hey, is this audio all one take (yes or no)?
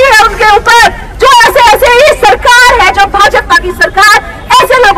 yes